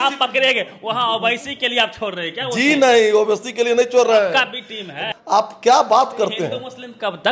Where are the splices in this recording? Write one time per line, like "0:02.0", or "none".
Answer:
0:05.1